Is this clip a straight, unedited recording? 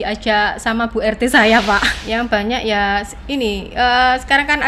no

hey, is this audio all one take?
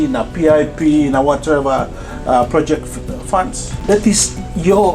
no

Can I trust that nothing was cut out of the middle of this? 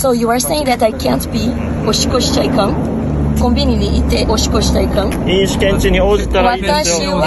yes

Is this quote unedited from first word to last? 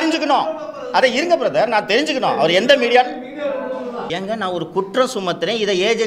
no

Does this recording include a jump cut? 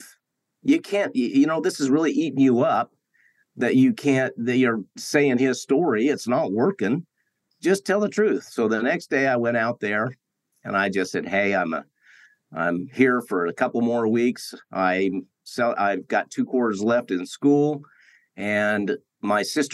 yes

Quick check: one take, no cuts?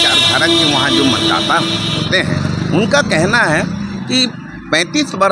yes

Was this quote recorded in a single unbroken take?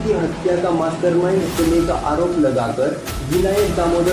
yes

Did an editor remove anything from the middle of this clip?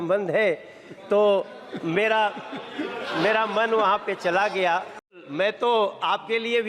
yes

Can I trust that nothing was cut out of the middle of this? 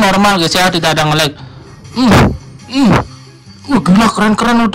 yes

